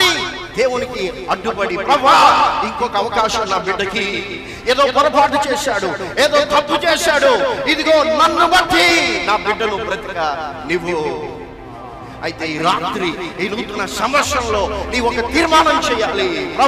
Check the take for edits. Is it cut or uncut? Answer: cut